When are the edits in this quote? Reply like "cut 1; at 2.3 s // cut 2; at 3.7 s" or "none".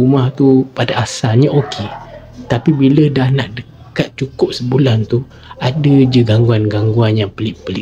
none